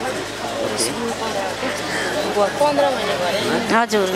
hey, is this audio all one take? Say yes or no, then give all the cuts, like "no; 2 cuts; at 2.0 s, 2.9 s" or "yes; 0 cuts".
yes; 0 cuts